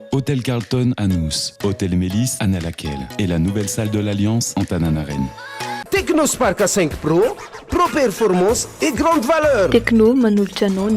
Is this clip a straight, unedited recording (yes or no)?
no